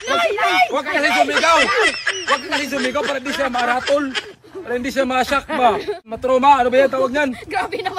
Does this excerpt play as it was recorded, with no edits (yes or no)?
no